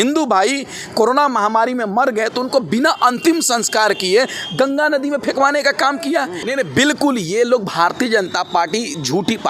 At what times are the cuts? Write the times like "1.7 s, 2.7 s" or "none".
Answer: 6.4 s